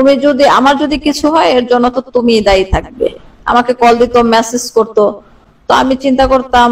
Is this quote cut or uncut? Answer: uncut